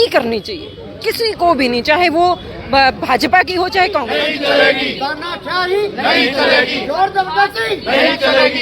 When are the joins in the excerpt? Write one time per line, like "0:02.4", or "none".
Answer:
0:04.1